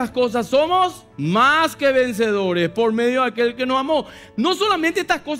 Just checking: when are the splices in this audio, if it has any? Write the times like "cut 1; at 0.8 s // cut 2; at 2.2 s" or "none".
cut 1; at 1.1 s